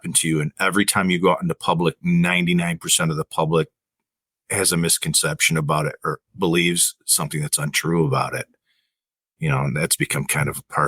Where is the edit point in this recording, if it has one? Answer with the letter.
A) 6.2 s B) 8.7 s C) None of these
A